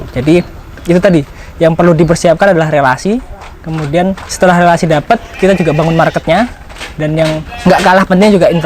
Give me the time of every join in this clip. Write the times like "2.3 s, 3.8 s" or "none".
4.3 s, 7.5 s